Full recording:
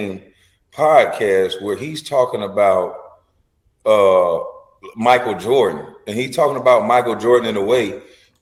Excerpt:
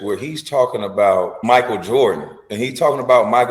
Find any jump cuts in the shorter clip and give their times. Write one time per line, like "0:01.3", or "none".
0:01.3